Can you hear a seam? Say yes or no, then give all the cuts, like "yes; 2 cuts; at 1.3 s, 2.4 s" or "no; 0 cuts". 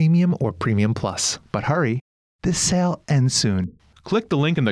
yes; 1 cut; at 1.3 s